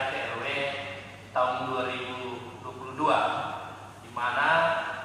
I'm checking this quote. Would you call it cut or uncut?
uncut